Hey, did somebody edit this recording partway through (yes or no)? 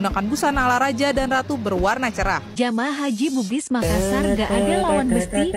yes